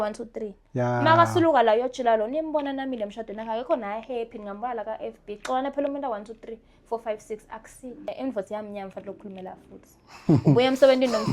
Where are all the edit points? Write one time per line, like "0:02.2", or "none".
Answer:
0:08.1